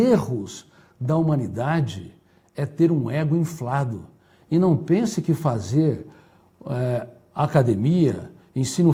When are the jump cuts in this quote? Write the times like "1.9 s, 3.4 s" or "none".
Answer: none